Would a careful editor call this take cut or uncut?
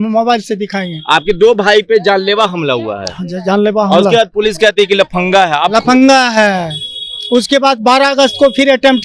uncut